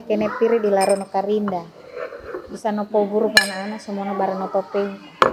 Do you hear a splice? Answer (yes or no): no